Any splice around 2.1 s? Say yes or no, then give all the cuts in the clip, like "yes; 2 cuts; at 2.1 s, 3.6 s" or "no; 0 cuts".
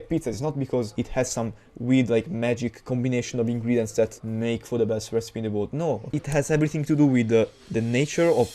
no; 3 cuts; at 0.9 s, 4.2 s, 6.1 s